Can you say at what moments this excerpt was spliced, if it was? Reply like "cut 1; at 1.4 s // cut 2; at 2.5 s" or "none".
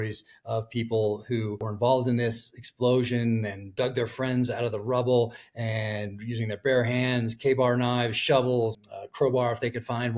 cut 1; at 1.7 s // cut 2; at 8.7 s